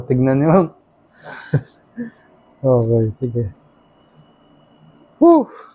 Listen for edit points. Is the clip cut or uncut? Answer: uncut